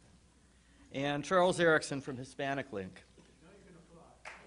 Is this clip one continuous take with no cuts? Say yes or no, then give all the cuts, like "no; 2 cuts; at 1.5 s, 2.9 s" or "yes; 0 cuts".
yes; 0 cuts